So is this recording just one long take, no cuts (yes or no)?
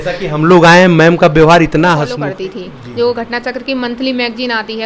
no